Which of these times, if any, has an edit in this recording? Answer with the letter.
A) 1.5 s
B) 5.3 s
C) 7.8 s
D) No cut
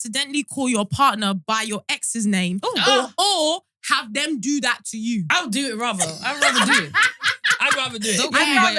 B